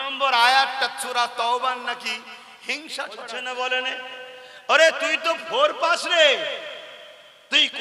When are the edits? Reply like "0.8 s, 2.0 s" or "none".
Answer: 3.3 s